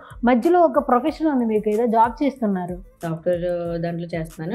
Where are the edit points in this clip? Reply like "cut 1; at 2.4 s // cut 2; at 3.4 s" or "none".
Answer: cut 1; at 2.9 s